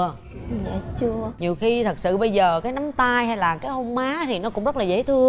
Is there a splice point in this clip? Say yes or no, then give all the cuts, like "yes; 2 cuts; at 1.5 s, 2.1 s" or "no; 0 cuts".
yes; 1 cut; at 1.3 s